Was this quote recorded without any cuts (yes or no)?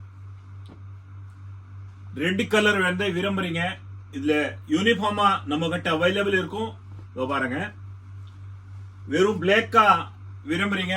yes